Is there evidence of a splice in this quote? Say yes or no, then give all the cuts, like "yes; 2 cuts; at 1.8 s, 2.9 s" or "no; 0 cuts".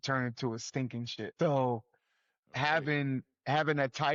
yes; 1 cut; at 1.3 s